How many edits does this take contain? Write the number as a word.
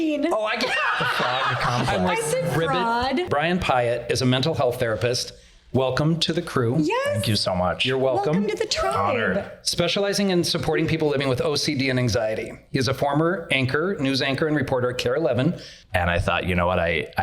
two